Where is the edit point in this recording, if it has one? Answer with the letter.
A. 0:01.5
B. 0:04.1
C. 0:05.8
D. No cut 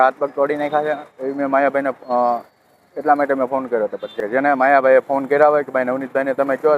B